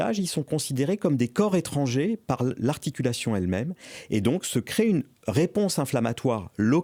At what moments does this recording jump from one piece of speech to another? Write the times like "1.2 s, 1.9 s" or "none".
none